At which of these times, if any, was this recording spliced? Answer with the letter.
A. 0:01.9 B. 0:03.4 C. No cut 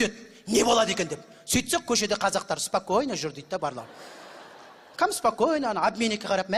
B